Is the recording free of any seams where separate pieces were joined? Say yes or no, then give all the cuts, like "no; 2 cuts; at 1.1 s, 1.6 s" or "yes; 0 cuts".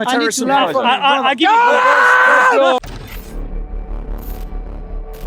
no; 1 cut; at 2.8 s